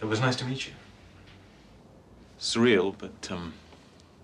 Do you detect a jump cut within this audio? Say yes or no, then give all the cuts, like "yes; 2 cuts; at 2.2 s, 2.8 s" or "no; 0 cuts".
no; 0 cuts